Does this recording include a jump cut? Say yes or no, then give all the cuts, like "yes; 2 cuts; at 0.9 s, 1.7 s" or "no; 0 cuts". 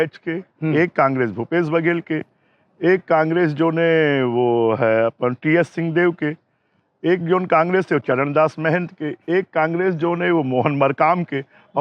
no; 0 cuts